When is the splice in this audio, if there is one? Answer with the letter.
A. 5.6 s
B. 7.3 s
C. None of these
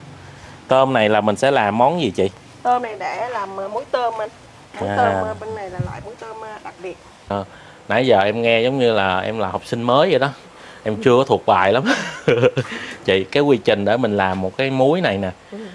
B